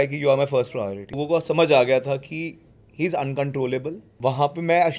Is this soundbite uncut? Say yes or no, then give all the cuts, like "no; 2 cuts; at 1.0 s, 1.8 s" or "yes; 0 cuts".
no; 2 cuts; at 1.2 s, 4.0 s